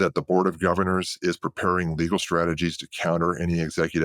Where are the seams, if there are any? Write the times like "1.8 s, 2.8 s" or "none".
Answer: none